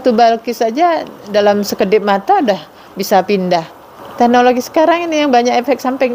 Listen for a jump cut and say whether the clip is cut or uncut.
cut